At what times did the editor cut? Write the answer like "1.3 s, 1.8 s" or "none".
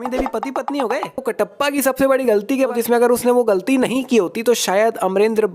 1.3 s, 2.7 s